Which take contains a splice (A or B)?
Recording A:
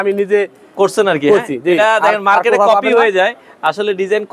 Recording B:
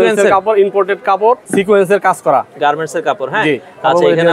B